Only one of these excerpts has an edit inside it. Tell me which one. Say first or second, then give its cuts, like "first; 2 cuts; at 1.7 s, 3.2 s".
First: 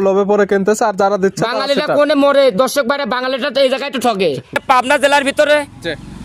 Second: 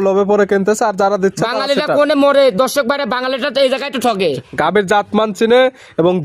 first; 1 cut; at 4.6 s